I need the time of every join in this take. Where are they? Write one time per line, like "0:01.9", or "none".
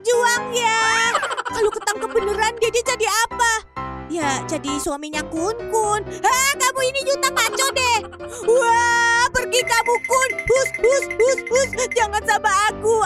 0:01.4

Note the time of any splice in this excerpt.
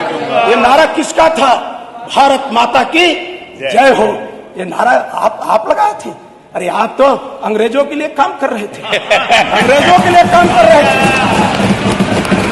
none

